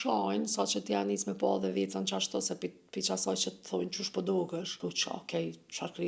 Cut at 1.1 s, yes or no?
no